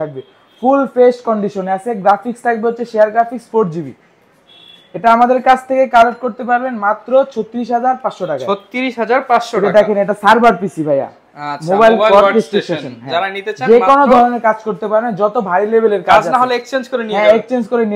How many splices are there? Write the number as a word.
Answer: zero